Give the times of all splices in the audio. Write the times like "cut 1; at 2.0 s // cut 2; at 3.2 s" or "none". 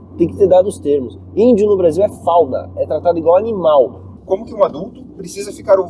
cut 1; at 4.1 s